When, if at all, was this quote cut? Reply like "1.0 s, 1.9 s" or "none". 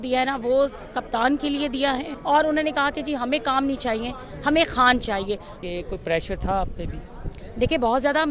2.1 s, 5.5 s